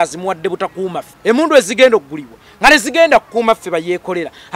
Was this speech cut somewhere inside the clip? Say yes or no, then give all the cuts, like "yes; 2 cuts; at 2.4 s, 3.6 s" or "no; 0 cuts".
yes; 1 cut; at 1.1 s